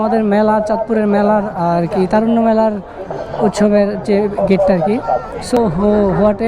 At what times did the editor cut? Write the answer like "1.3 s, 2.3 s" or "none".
5.6 s